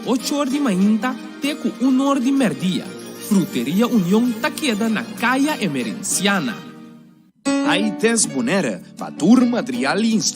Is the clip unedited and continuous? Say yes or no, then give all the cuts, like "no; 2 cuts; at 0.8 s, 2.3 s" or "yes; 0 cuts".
no; 1 cut; at 5.7 s